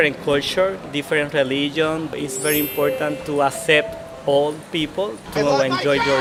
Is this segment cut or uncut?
uncut